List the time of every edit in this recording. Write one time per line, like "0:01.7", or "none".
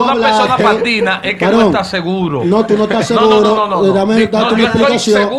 none